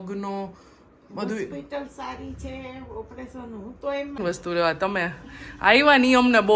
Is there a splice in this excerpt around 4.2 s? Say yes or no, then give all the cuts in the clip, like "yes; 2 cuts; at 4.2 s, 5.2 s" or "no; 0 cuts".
yes; 1 cut; at 4.2 s